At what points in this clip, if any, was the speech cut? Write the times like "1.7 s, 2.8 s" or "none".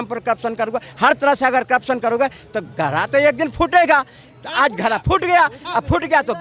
none